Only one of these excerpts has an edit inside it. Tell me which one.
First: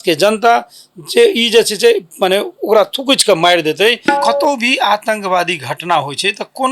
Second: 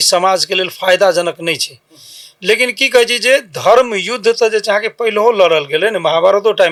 first; 1 cut; at 4.1 s

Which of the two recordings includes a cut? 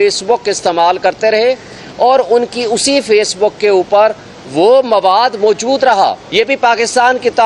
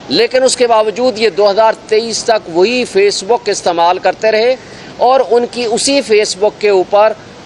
first; 1 cut; at 6.2 s

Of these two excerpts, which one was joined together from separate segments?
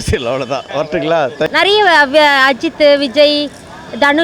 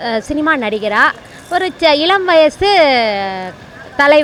first; 1 cut; at 1.5 s

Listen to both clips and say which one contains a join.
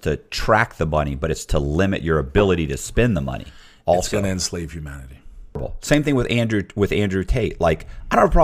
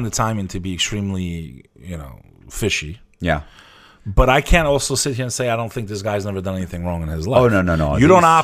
first; 1 cut; at 5.7 s

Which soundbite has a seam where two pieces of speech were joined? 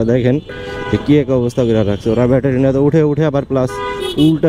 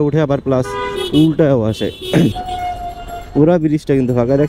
second; 1 cut; at 2.4 s

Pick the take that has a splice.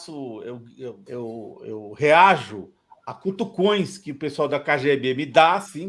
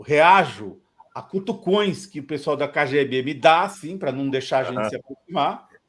first; 1 cut; at 1.0 s

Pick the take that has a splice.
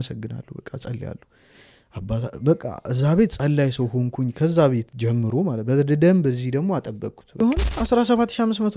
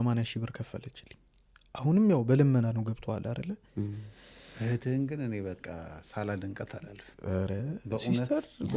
first; 1 cut; at 7.4 s

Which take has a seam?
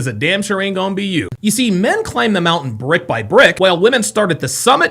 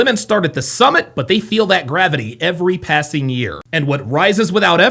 first; 1 cut; at 1.3 s

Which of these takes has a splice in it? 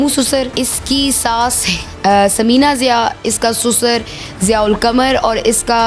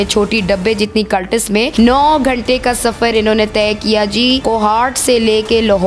second; 2 cuts; at 1.7 s, 4.4 s

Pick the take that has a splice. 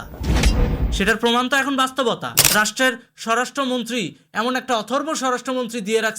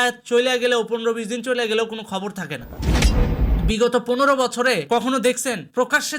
first; 1 cut; at 2.4 s

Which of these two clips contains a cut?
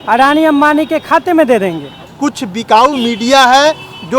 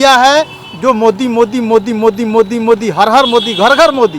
first; 1 cut; at 2.1 s

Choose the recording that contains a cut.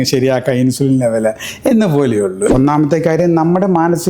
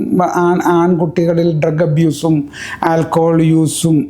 first; 1 cut; at 2.5 s

